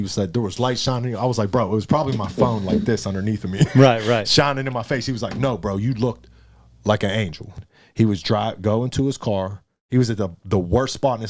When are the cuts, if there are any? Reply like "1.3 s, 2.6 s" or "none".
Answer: 7.7 s

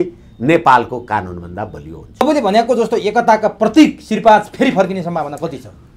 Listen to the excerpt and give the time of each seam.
2.2 s

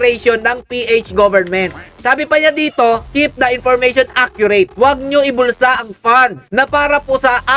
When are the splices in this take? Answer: none

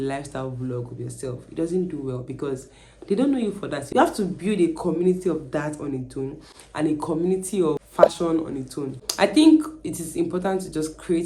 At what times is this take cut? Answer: 3.8 s, 7.9 s, 8.9 s

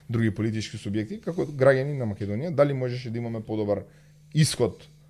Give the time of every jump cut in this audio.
none

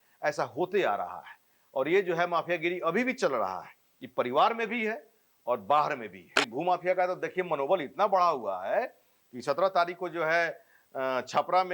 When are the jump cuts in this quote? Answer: 6.4 s

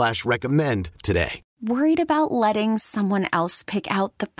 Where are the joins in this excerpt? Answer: 1.4 s

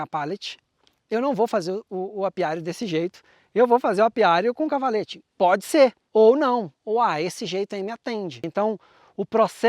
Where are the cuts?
6.0 s, 8.4 s

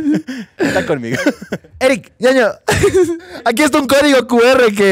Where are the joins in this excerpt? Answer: 1.6 s, 3.3 s

